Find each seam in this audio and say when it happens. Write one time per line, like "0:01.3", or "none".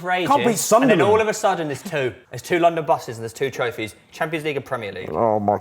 0:02.3